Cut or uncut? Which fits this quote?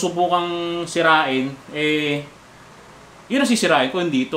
uncut